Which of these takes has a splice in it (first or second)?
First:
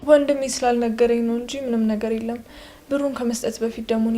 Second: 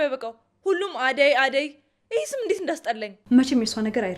second